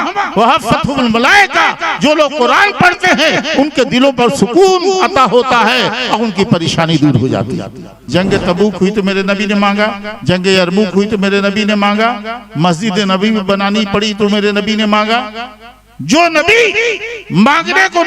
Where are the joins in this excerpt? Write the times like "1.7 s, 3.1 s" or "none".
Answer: 7.9 s